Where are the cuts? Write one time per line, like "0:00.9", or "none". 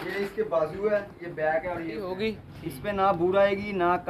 0:02.1